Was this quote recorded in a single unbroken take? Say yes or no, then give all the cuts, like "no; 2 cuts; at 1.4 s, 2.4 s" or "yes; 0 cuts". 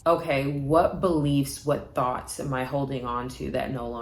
yes; 0 cuts